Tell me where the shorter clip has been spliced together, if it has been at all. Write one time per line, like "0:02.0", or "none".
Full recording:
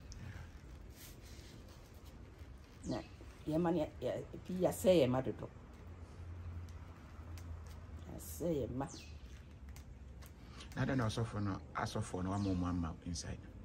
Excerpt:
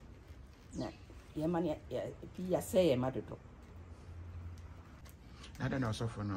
0:05.0